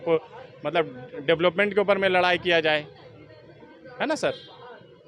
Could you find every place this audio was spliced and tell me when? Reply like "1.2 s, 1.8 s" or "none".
none